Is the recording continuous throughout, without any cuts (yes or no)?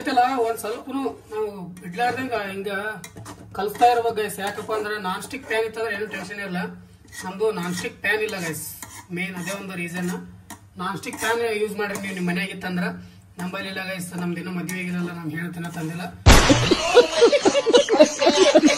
yes